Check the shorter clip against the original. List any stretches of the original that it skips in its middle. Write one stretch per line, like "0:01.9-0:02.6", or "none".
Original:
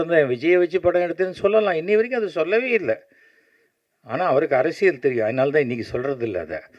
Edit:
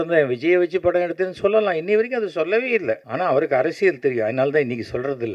0:03.1-0:04.1